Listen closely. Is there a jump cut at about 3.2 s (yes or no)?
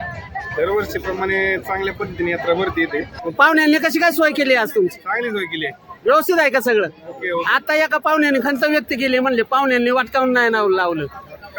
yes